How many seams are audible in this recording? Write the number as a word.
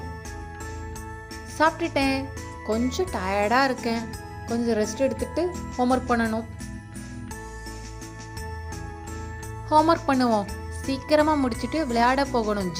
two